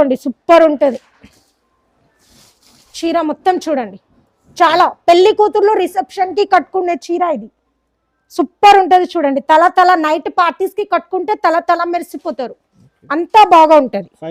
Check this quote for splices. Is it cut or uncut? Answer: uncut